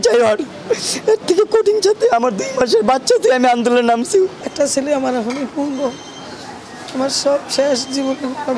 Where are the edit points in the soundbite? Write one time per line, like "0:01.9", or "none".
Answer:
0:04.4

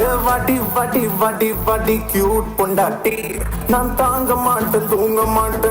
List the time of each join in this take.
none

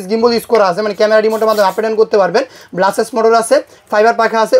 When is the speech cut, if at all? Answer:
none

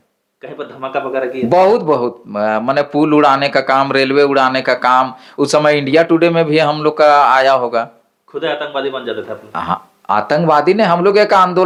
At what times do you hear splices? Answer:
none

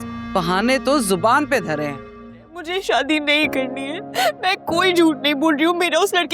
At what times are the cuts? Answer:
0:02.5

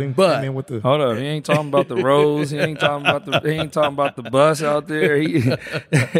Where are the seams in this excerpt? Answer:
none

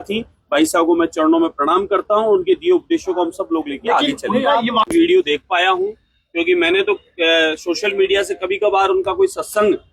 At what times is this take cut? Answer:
0:04.8

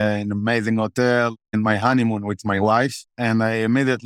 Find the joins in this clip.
0:01.5
0:03.0

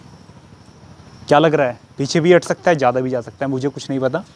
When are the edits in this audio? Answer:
none

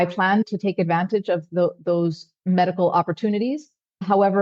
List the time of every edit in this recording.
none

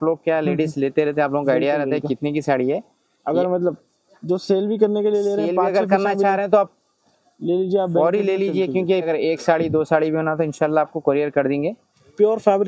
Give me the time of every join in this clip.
0:09.1

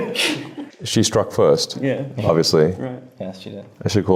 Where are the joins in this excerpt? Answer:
none

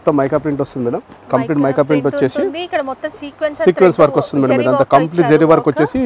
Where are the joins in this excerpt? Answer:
none

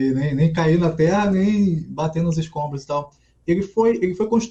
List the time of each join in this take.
none

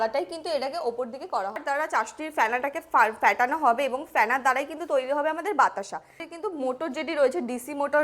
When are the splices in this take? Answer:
0:01.6
0:06.2

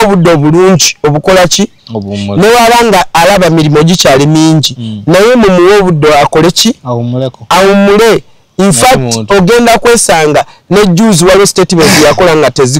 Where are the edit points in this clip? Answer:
none

